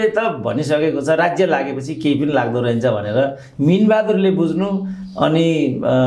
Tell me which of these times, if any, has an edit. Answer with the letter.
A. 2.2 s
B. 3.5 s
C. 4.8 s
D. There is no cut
D